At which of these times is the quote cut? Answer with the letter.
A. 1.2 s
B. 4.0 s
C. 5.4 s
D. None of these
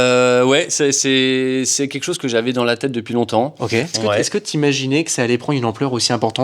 B